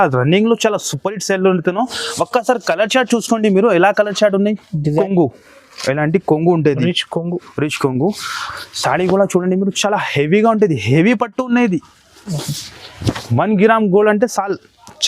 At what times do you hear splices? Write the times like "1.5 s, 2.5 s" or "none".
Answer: 5.0 s

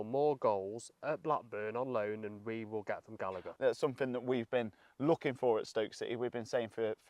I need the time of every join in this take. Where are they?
3.5 s

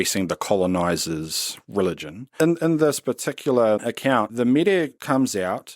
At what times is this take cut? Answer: 2.3 s, 4.3 s

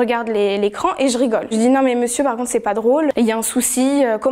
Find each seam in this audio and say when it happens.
1.5 s, 3.1 s

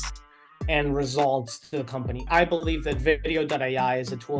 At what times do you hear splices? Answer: 2.3 s

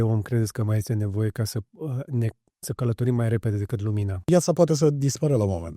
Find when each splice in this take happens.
4.3 s

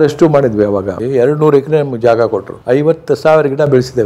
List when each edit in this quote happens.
1.0 s, 2.5 s

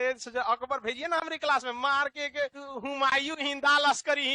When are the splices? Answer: 2.6 s

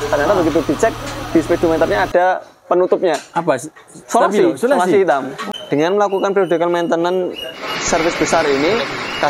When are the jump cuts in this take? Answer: 5.5 s

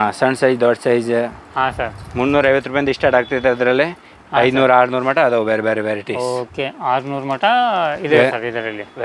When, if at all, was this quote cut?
none

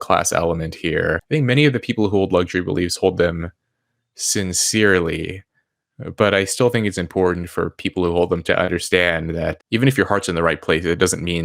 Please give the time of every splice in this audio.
1.2 s, 8.4 s, 9.6 s

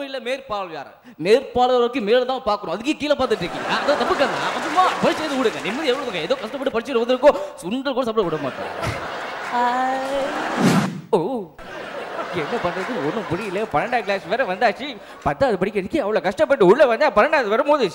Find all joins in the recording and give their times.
10.9 s

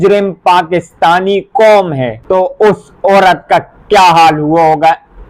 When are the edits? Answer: 2.1 s

